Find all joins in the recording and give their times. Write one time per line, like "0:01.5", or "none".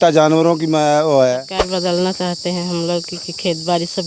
0:01.5